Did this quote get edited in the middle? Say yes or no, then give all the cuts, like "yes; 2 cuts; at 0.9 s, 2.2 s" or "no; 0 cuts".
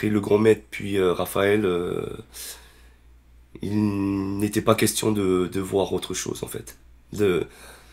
no; 0 cuts